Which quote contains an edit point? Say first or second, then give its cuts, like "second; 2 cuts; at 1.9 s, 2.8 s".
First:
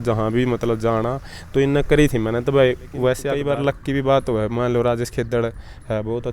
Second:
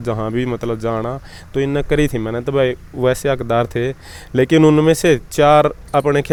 first; 1 cut; at 3.3 s